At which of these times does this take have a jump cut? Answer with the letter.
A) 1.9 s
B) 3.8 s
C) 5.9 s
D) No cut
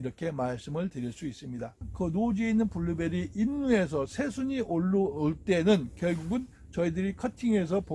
A